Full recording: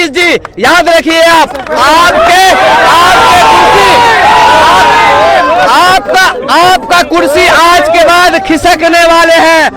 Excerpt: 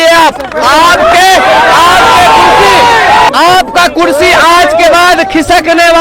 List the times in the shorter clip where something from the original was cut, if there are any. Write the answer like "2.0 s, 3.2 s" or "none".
3.3 s

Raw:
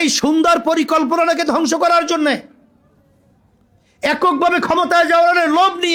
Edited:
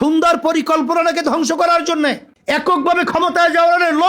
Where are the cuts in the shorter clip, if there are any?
2.3 s

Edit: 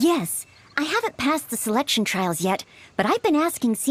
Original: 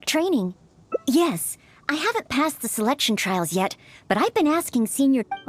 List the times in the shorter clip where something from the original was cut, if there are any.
none

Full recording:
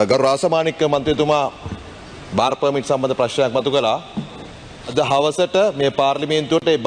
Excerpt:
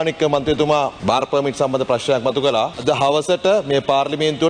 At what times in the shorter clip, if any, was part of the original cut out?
1.0 s, 2.8 s

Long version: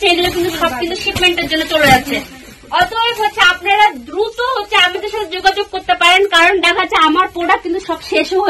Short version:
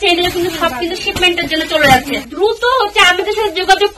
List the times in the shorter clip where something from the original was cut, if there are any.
2.3 s

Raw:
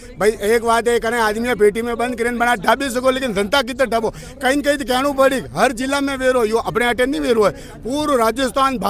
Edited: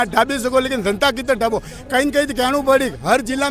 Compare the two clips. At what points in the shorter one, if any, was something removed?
none

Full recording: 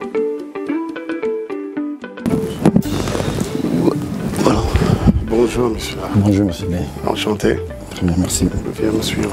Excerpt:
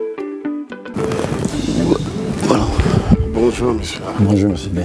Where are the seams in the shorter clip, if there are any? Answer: 0.9 s

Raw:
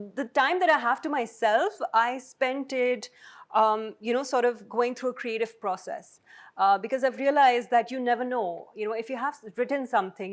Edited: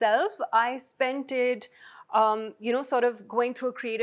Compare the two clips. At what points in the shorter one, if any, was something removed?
none

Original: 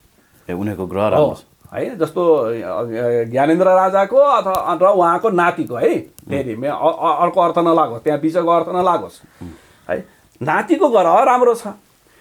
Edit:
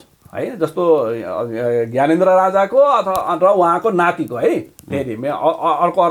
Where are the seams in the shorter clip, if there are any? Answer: none

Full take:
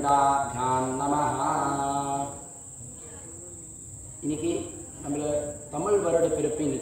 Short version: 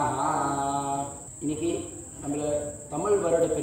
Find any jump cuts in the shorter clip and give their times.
1.2 s

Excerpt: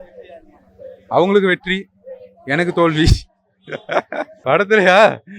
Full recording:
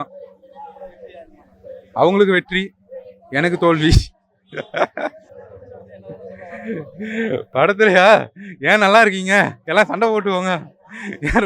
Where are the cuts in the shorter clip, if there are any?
4.4 s

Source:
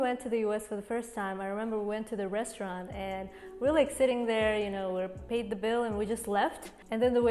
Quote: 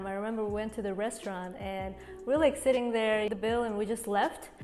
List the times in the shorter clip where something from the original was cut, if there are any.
3.3 s

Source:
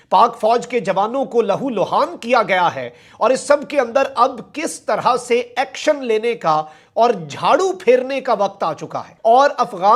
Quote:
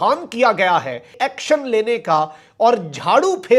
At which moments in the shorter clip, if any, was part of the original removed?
1.1 s

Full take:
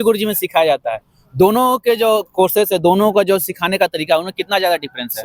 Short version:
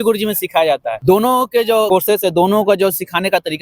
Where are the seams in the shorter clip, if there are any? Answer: 0.9 s, 1.9 s

